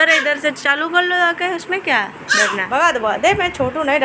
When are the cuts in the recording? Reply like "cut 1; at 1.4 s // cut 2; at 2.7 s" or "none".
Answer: cut 1; at 2.6 s